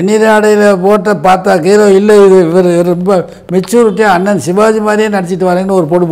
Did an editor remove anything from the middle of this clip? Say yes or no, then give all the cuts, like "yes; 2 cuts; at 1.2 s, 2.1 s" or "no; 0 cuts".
no; 0 cuts